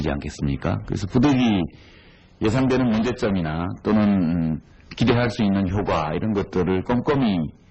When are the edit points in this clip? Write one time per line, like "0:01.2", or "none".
0:03.7